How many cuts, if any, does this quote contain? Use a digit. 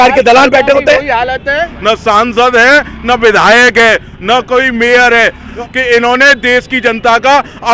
2